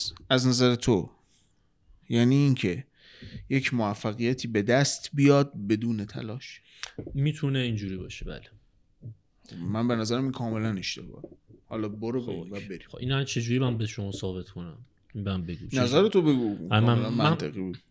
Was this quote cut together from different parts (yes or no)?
no